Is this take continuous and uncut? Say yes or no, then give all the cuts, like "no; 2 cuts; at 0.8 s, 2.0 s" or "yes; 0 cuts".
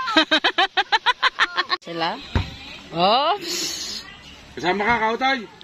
no; 1 cut; at 1.8 s